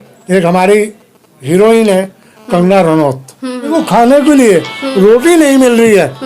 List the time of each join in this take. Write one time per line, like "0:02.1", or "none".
0:03.7